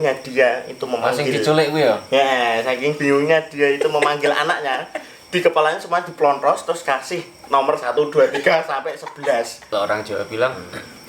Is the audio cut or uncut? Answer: cut